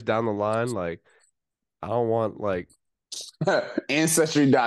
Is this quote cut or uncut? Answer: uncut